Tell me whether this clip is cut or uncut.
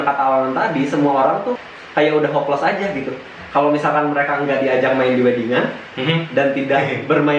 cut